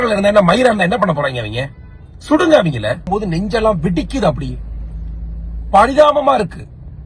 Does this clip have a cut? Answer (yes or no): yes